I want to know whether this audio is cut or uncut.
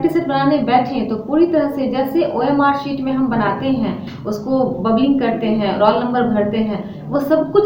uncut